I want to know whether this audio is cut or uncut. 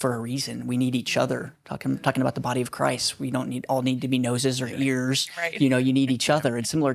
uncut